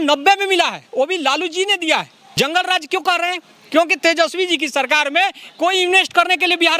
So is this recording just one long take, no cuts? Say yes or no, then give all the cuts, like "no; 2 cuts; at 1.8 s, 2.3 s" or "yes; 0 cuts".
no; 1 cut; at 2.2 s